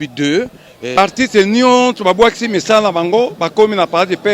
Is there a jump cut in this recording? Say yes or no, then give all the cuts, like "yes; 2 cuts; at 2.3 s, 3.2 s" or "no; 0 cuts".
yes; 1 cut; at 0.9 s